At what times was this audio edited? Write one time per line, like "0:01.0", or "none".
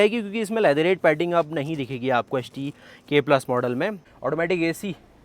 0:04.0